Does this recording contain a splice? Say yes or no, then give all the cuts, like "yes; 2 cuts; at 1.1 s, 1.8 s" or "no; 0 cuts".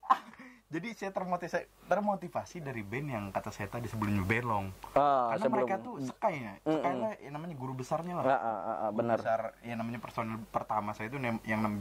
no; 0 cuts